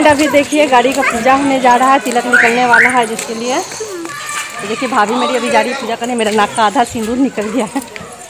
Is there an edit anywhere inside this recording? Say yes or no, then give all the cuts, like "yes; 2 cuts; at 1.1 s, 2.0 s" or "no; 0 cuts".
no; 0 cuts